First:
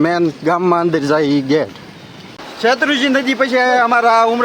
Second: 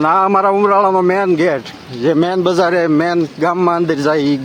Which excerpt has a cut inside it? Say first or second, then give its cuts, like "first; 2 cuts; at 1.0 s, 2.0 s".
first; 1 cut; at 2.4 s